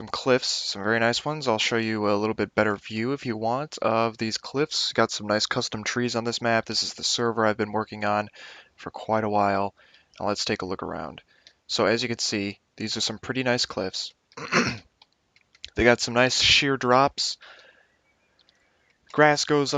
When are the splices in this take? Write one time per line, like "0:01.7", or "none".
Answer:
0:10.0